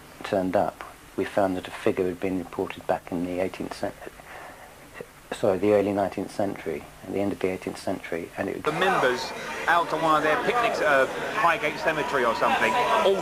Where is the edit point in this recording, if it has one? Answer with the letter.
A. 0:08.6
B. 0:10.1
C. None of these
C